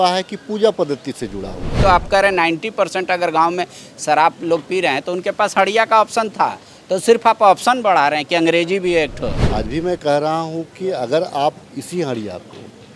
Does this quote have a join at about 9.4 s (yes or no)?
yes